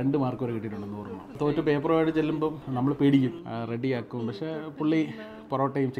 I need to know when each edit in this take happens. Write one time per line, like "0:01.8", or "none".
0:01.3
0:02.6
0:03.4